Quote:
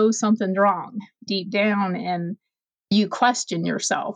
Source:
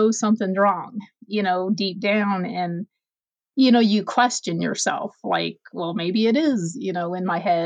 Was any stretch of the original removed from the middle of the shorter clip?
yes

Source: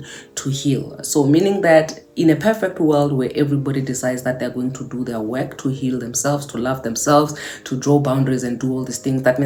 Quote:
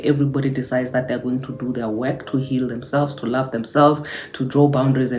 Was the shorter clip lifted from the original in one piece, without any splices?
yes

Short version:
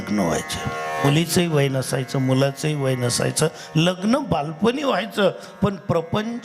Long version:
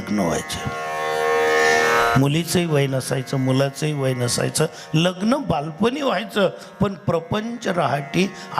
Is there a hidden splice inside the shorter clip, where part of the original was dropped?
yes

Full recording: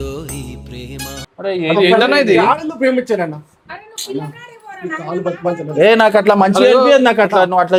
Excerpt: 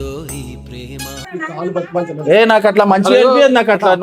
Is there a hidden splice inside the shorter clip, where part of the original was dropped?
yes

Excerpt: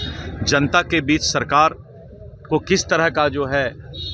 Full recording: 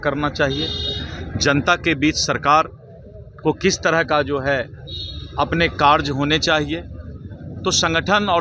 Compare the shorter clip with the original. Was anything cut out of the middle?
no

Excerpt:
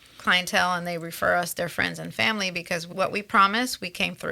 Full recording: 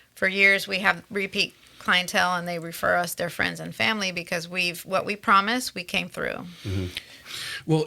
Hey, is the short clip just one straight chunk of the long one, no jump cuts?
no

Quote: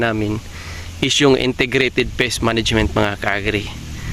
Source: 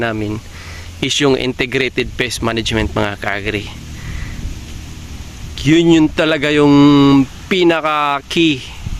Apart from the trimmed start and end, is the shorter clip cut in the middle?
no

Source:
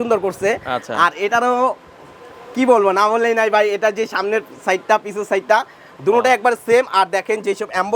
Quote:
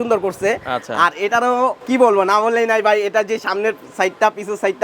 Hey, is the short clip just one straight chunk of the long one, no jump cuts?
no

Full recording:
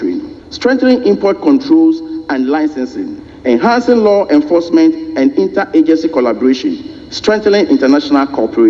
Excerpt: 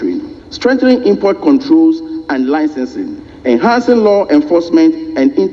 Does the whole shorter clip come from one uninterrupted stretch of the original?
yes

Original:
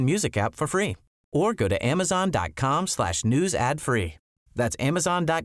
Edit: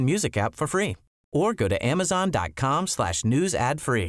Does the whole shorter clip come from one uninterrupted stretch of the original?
yes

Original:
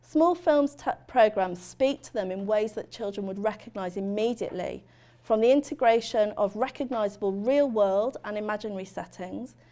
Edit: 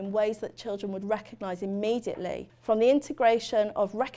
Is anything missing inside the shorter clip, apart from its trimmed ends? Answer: yes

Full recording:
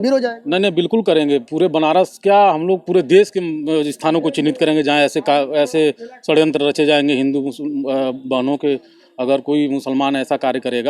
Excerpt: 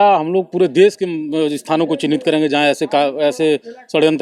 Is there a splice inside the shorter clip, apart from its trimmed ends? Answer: no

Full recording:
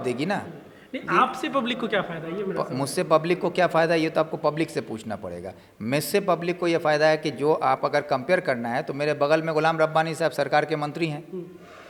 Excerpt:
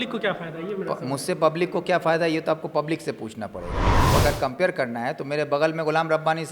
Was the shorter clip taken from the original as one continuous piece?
no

